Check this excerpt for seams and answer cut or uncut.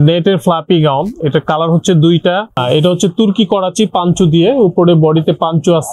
cut